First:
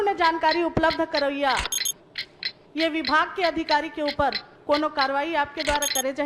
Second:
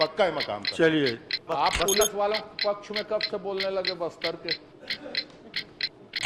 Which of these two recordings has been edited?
second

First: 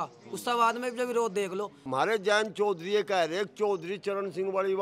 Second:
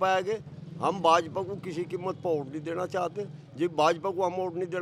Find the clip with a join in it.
first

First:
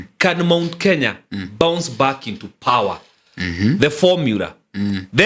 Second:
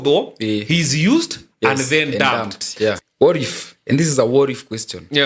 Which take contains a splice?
second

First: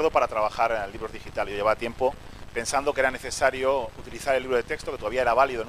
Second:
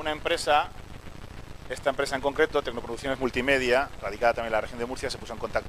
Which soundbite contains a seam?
second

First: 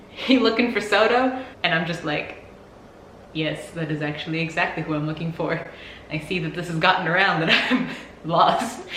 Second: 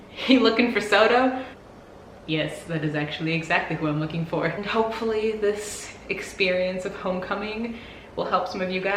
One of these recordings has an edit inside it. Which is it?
second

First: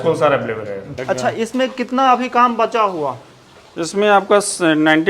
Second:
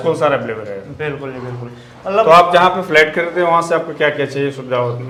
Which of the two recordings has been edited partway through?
first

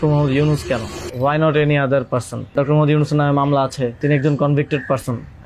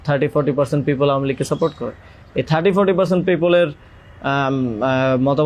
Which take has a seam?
first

